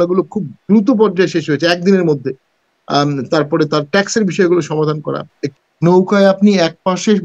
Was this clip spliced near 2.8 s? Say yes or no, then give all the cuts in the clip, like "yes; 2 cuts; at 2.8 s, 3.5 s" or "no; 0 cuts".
no; 1 cut; at 5.4 s